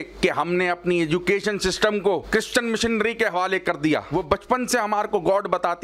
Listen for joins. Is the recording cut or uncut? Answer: cut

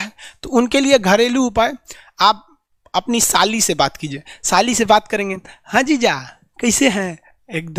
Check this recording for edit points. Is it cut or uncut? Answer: uncut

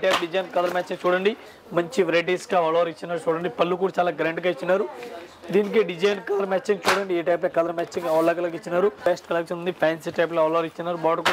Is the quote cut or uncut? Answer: cut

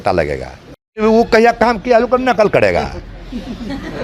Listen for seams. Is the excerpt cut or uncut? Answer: cut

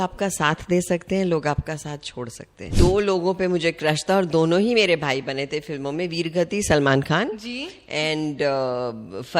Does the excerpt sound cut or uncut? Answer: cut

